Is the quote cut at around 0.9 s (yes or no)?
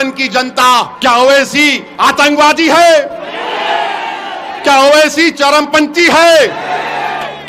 yes